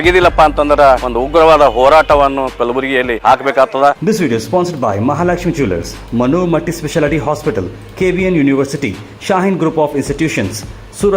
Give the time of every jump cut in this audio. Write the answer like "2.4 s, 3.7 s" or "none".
1.1 s, 3.1 s, 4.0 s

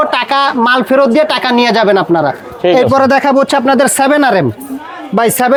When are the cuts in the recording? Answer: none

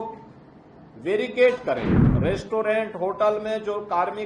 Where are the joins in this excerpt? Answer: 2.1 s

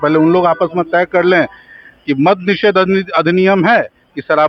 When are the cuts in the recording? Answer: none

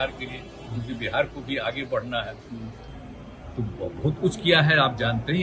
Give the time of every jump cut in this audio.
none

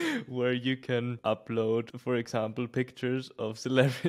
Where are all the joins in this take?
1.2 s, 1.9 s

